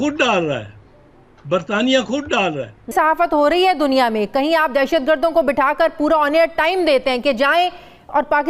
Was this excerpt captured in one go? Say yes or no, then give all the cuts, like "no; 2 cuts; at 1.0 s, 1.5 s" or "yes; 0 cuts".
no; 1 cut; at 2.9 s